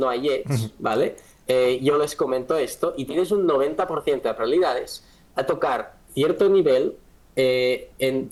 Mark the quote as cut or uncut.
uncut